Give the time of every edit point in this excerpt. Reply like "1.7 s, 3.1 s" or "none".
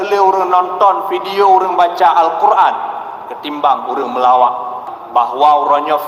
4.8 s